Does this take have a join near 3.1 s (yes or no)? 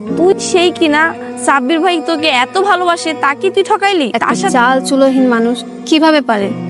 no